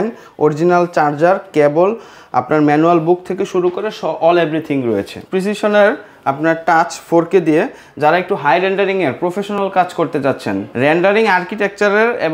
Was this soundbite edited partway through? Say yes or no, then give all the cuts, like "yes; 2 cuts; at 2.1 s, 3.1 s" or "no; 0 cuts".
yes; 2 cuts; at 5.2 s, 10.7 s